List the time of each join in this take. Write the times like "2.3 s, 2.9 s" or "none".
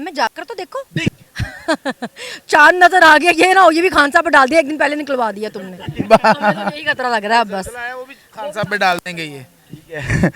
1.0 s